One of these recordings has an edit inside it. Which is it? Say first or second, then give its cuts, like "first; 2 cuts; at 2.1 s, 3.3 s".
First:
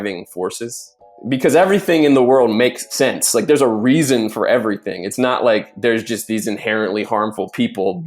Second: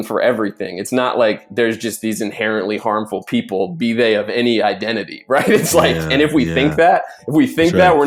first; 2 cuts; at 1.1 s, 2.9 s